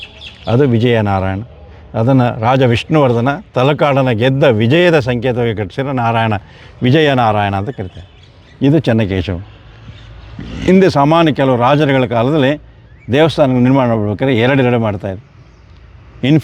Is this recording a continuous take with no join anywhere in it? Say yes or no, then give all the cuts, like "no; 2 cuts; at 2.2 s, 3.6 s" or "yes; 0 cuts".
yes; 0 cuts